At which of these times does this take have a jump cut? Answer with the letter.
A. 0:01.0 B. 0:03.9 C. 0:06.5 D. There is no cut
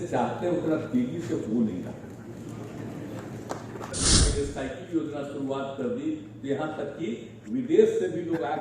B